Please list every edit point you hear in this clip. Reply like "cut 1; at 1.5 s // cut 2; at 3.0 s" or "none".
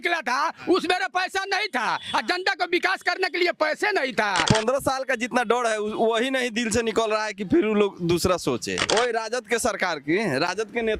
cut 1; at 4.4 s // cut 2; at 8.8 s